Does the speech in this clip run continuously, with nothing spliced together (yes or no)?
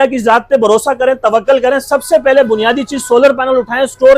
yes